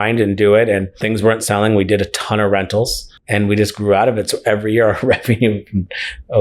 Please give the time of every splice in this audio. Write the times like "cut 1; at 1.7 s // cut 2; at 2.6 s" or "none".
cut 1; at 0.9 s

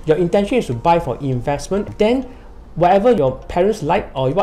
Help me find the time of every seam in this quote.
cut 1; at 1.9 s // cut 2; at 3.2 s

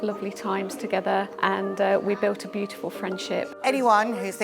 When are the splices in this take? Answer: cut 1; at 1.3 s // cut 2; at 3.5 s

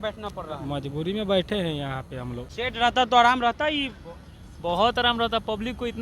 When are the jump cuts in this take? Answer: cut 1; at 2.4 s

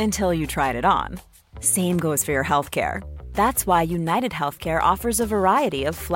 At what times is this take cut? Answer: none

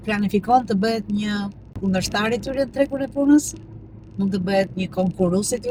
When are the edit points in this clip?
none

